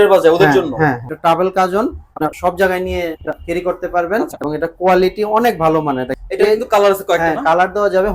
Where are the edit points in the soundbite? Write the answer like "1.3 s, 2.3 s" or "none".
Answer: 1.1 s, 2.3 s, 3.4 s, 4.4 s, 6.2 s